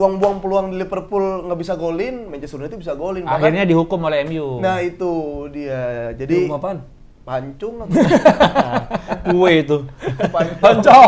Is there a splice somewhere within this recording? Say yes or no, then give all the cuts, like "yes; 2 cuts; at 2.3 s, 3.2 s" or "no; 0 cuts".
no; 0 cuts